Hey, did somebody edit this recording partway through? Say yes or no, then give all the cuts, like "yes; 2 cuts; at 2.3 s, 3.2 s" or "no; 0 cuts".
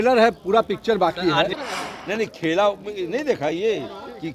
yes; 1 cut; at 1.5 s